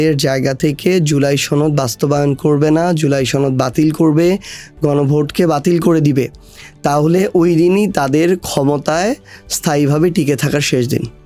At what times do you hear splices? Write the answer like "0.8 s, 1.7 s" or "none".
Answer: none